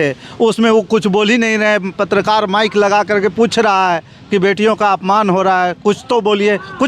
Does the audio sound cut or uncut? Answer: uncut